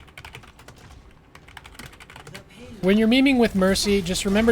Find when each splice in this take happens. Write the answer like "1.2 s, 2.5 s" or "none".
2.8 s